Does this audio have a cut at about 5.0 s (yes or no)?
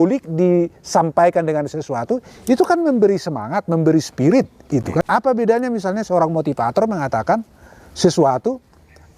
yes